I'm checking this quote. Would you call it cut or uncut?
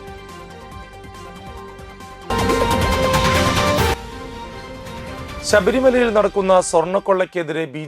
cut